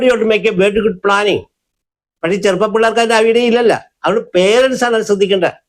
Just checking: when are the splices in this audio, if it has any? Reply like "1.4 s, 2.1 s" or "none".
none